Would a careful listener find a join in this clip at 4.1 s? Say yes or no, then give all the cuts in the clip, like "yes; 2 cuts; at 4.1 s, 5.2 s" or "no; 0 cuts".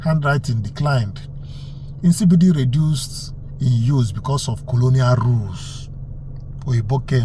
no; 0 cuts